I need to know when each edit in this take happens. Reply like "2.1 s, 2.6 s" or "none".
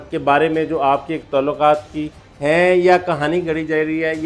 none